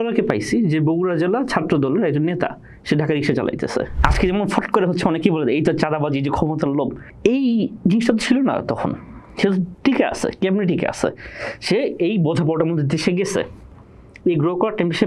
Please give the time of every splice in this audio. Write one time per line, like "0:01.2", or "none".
0:03.9